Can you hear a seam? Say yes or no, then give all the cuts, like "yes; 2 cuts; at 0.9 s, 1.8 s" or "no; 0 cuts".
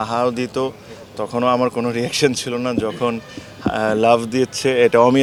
no; 0 cuts